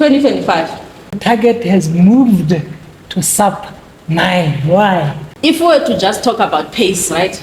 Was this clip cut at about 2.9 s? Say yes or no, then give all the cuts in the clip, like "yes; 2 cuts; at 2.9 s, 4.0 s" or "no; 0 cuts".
no; 2 cuts; at 1.2 s, 5.2 s